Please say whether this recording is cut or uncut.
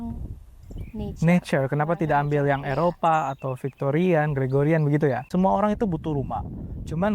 cut